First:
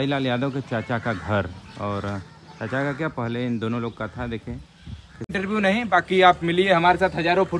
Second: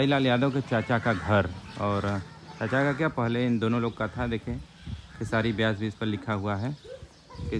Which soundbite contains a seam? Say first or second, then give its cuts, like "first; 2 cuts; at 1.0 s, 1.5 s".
first; 1 cut; at 5.3 s